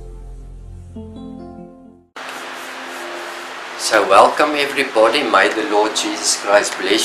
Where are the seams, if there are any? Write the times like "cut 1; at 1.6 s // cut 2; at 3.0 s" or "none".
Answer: cut 1; at 1.8 s